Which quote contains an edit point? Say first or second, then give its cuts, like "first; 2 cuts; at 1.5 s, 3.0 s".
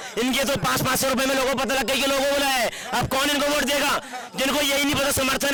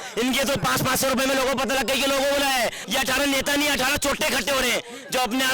second; 1 cut; at 2.8 s